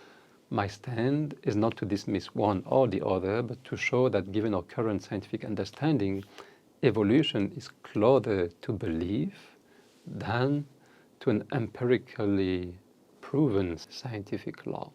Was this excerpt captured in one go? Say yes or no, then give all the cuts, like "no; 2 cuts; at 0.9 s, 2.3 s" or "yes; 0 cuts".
no; 1 cut; at 13.9 s